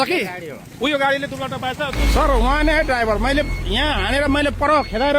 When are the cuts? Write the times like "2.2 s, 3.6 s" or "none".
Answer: 2.0 s